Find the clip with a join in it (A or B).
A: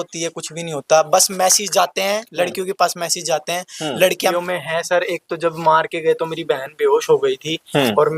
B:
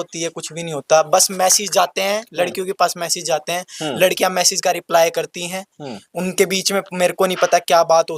A